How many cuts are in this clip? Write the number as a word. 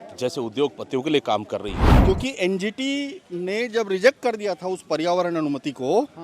one